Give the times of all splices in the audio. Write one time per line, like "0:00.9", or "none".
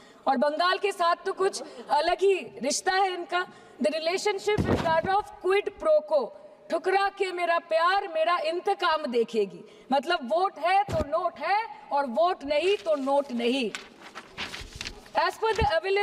none